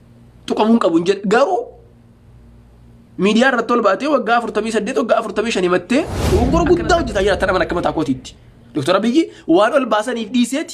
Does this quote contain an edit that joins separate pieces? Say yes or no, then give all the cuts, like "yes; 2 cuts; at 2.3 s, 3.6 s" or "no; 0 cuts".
yes; 1 cut; at 6.2 s